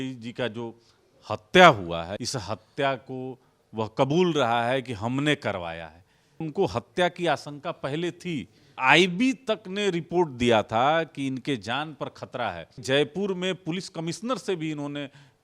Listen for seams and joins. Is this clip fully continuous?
no; 4 cuts; at 2.1 s, 6.5 s, 8.8 s, 12.8 s

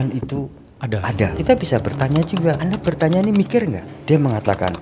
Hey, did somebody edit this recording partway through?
yes; 3 cuts; at 1.3 s, 2.6 s, 3.9 s

